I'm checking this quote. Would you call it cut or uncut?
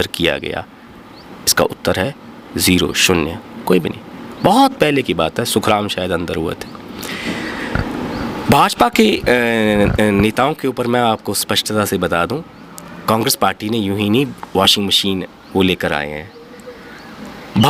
uncut